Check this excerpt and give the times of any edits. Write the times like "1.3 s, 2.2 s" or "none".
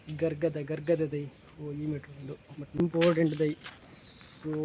2.8 s